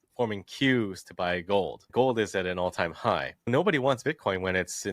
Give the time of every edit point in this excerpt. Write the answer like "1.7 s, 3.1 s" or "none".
1.9 s, 3.5 s